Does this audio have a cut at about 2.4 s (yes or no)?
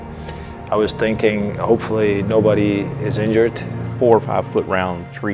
no